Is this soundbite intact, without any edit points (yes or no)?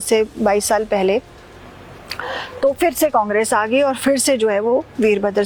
yes